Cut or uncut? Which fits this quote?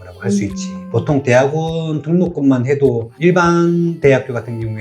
cut